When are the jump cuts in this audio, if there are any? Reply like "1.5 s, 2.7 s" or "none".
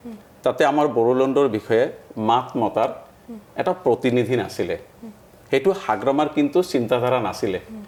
none

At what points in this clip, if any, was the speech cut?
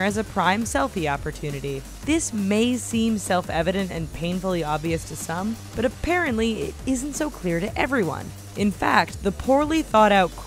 1.2 s

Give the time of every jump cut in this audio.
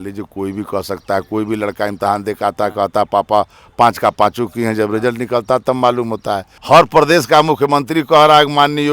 6.5 s

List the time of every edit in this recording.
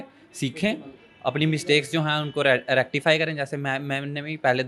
none

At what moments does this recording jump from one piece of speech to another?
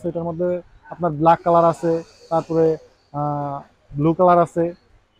none

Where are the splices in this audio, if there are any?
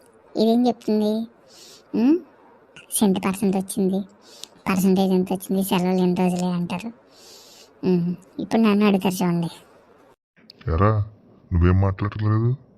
none

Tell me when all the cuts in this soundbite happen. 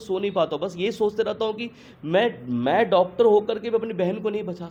none

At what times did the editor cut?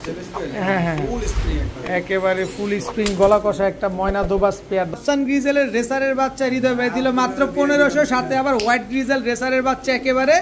4.9 s

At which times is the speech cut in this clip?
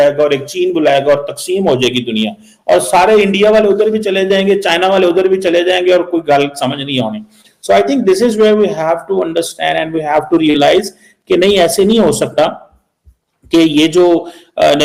none

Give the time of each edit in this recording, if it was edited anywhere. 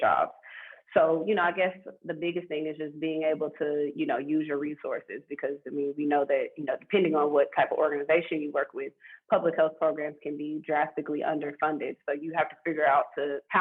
none

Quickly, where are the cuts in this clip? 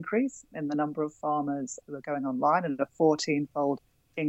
1.8 s

